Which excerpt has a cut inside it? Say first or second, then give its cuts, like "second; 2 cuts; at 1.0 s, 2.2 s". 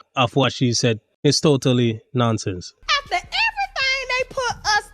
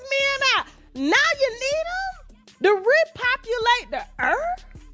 first; 1 cut; at 2.7 s